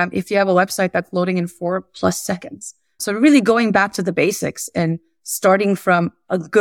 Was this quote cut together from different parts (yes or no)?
no